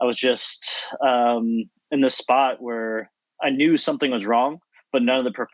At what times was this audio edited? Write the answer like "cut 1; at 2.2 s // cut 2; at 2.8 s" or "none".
none